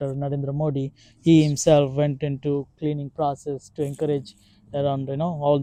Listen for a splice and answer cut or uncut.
uncut